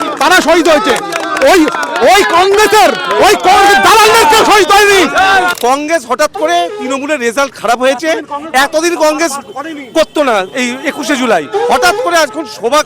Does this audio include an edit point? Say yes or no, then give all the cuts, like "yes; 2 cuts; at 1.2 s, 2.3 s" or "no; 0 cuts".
yes; 1 cut; at 5.5 s